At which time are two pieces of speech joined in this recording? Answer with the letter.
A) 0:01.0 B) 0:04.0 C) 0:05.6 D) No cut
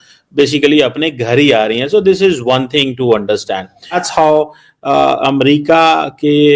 B